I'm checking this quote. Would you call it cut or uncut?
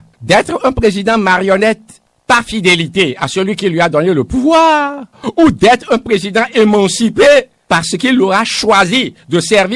uncut